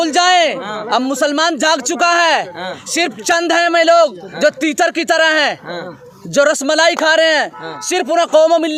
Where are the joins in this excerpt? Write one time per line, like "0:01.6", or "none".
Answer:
none